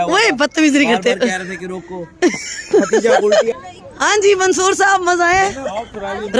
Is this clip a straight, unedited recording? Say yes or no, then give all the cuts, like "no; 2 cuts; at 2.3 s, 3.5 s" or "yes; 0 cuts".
no; 1 cut; at 3.7 s